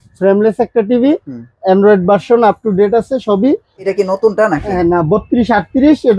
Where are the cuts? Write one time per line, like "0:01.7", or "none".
0:03.9